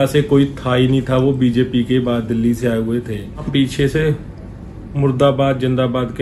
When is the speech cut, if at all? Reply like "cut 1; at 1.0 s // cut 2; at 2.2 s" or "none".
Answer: cut 1; at 3.4 s